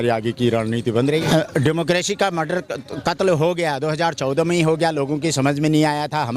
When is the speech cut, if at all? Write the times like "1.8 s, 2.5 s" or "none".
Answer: 1.2 s